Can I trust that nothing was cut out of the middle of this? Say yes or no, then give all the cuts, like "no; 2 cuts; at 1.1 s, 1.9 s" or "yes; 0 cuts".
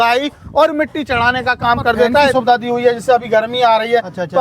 no; 1 cut; at 2.3 s